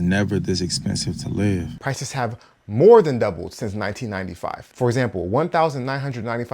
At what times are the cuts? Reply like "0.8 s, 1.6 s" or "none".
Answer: 1.8 s